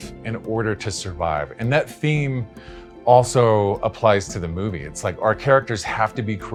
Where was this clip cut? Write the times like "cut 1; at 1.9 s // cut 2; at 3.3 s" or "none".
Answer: none